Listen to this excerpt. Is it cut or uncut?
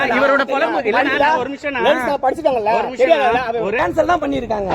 cut